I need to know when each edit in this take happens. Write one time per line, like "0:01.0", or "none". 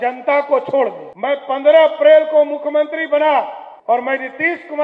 0:01.1
0:03.6